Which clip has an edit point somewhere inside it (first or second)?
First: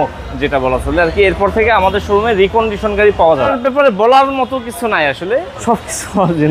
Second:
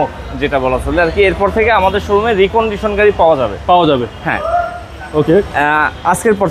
first